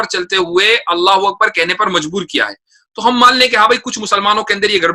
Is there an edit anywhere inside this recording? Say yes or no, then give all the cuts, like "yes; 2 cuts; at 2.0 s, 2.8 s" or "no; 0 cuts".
no; 0 cuts